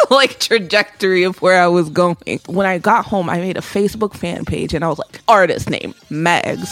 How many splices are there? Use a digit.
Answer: 2